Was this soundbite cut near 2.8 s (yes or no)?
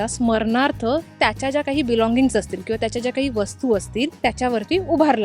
no